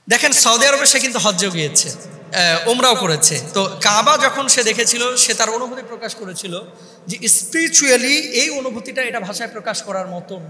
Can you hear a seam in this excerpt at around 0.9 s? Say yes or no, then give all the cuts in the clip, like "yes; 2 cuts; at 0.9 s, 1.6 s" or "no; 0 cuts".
no; 0 cuts